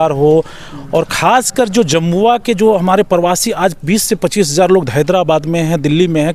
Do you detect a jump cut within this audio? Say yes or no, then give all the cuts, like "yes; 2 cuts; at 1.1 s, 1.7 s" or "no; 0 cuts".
no; 0 cuts